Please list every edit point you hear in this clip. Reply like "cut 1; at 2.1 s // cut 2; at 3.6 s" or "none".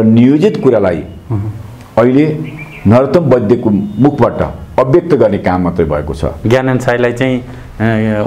cut 1; at 6.3 s